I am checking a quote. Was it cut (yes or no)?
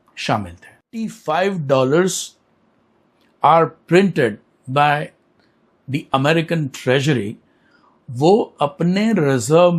yes